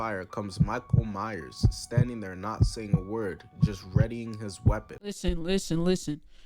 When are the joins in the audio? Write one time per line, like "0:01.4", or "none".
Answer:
0:05.1